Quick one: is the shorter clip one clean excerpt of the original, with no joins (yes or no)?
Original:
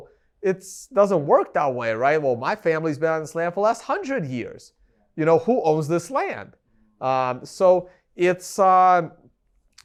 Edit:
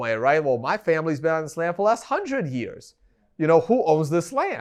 yes